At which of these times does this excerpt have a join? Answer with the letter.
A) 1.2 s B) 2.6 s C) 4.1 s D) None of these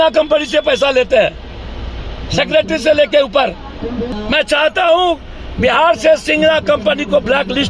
C